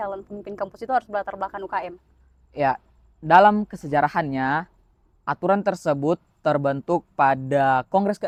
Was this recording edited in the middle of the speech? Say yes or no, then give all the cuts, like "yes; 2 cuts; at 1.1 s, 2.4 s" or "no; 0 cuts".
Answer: no; 0 cuts